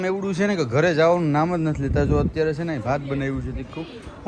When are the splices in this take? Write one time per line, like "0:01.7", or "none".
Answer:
none